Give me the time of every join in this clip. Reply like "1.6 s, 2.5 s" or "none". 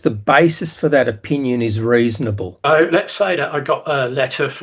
2.5 s